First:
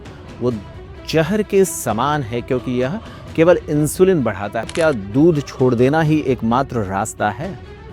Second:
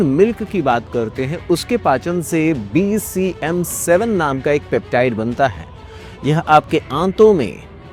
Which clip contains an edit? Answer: first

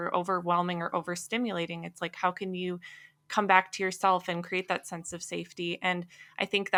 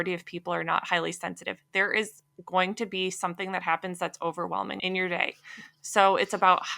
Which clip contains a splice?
second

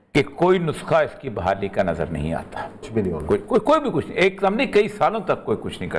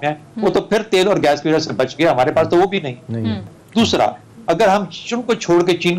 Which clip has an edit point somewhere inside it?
second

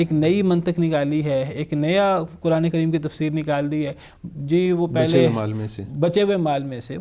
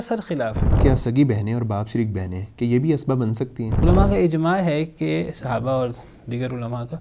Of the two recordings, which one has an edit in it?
second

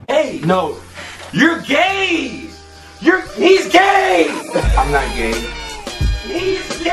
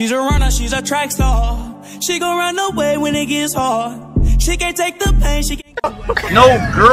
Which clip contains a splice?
second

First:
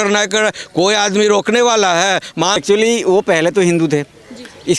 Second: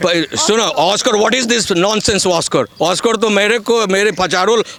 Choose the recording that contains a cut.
first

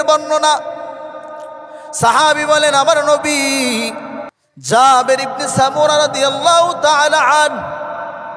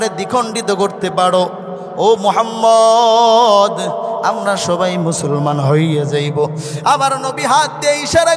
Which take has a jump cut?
first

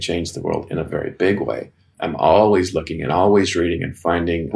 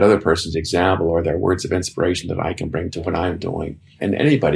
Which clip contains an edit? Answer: second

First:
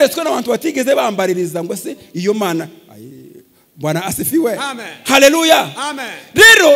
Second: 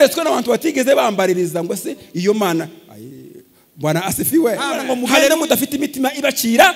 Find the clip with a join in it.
second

